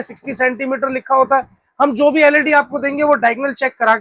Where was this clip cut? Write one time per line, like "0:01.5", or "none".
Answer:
none